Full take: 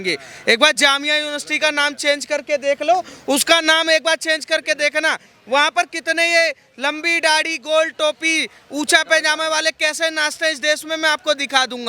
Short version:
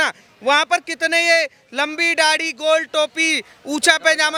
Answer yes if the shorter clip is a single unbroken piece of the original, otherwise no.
yes